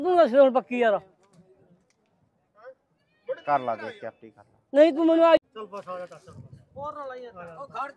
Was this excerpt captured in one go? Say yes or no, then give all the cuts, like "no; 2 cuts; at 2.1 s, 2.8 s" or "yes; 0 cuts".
no; 1 cut; at 5.4 s